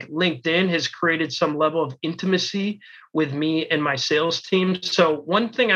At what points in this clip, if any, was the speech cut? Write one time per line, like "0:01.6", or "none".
none